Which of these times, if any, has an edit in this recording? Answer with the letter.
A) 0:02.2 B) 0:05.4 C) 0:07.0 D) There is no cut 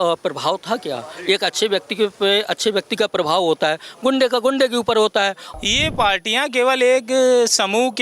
B